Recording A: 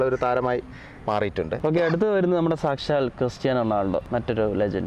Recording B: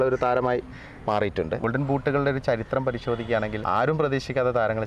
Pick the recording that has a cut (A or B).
B